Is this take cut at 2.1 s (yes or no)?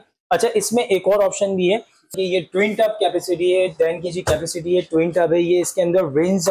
yes